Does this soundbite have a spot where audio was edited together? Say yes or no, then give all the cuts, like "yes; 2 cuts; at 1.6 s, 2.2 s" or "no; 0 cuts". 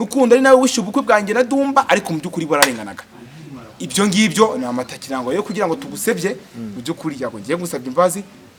no; 0 cuts